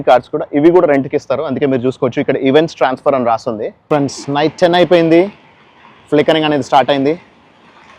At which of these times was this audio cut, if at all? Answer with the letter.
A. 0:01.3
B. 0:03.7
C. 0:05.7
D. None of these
B